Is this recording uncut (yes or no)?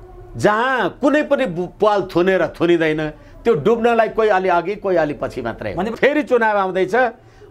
no